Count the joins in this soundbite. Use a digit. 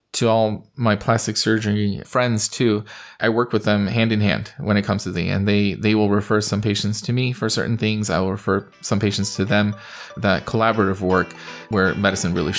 2